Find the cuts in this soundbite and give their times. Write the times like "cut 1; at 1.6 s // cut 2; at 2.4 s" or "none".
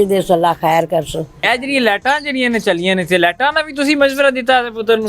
cut 1; at 1.4 s